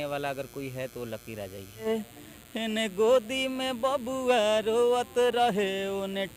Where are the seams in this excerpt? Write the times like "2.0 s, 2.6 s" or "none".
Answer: 1.9 s